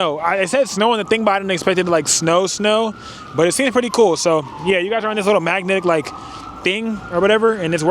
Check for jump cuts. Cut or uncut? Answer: uncut